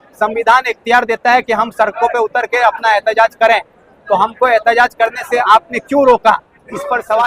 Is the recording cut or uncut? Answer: uncut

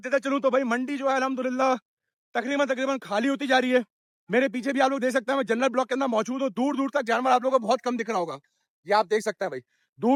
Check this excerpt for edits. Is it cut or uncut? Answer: uncut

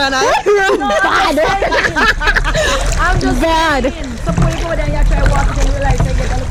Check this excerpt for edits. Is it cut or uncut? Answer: uncut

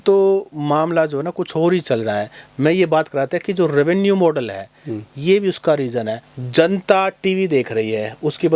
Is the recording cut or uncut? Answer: uncut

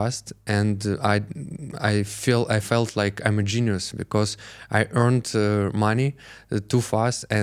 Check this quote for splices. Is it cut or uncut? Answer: uncut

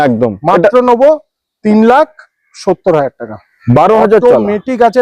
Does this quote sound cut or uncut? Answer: cut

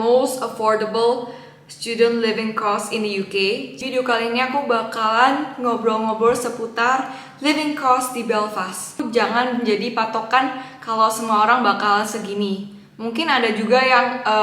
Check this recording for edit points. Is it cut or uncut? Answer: cut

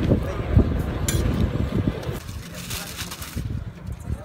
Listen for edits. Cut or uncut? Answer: cut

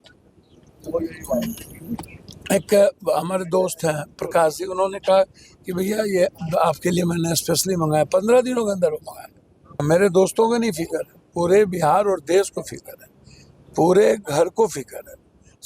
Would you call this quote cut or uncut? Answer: cut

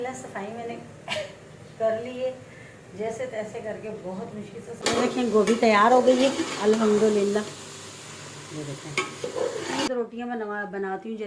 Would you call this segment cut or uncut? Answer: cut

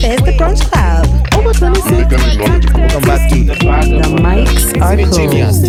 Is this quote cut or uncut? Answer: uncut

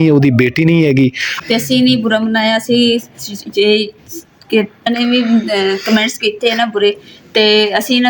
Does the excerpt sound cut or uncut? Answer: cut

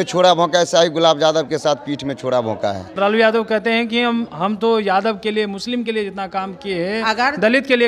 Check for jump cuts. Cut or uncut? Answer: cut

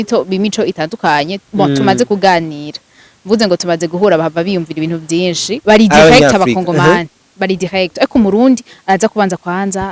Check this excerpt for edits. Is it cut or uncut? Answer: cut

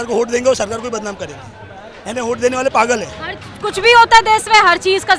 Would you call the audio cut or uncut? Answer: uncut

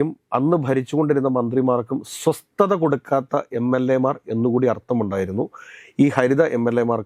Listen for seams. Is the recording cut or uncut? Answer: uncut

